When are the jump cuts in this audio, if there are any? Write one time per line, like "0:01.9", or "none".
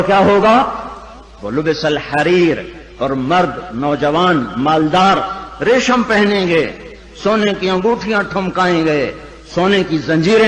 0:02.8